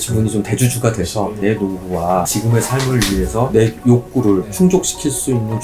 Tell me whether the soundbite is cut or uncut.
cut